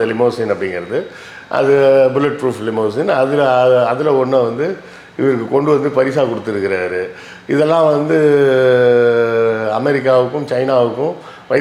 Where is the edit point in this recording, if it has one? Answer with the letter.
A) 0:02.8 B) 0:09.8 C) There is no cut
C